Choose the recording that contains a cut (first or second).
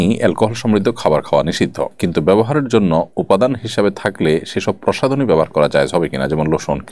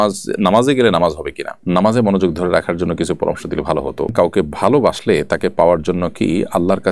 second